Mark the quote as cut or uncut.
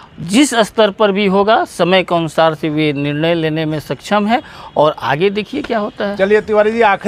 uncut